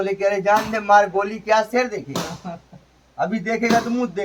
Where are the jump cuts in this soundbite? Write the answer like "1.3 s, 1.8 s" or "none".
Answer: none